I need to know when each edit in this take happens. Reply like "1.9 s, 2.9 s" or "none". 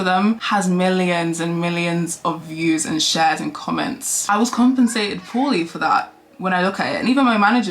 none